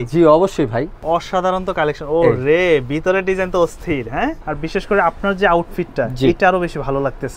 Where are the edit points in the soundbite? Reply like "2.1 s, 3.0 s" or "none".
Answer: 0.9 s, 4.4 s